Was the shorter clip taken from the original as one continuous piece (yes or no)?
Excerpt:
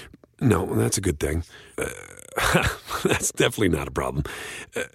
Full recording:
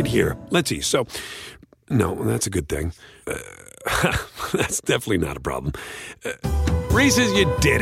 yes